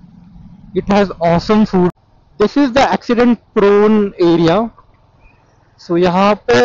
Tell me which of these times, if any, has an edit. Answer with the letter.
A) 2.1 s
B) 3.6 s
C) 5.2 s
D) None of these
A